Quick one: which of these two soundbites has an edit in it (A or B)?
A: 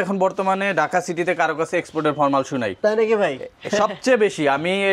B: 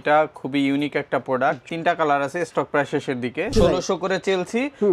B